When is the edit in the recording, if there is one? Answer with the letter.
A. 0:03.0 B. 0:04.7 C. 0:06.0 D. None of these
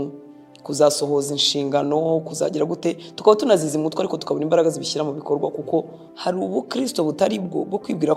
C